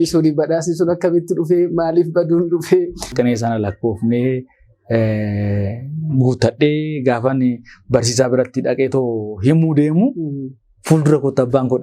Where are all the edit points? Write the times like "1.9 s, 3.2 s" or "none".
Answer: 3.1 s